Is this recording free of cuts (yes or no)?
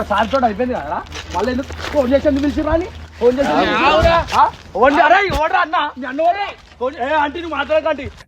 no